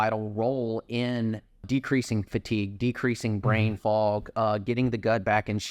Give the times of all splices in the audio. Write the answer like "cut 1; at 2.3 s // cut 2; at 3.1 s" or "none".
none